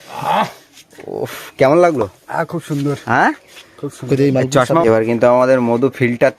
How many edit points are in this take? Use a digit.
1